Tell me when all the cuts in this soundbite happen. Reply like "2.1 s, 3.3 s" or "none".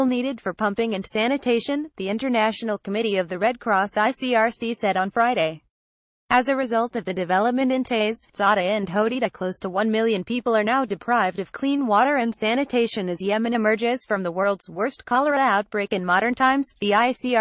none